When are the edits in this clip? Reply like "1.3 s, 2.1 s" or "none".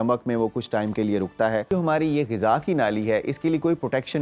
1.7 s